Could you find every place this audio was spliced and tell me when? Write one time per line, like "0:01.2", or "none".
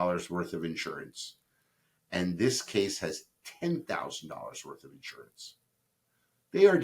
none